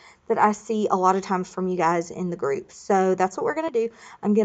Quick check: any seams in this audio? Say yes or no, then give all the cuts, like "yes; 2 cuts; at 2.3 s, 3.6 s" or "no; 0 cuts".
no; 0 cuts